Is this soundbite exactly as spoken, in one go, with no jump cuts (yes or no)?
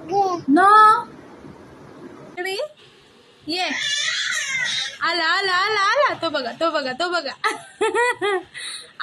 no